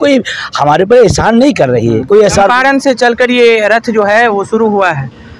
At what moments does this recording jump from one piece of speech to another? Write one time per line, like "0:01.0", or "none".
none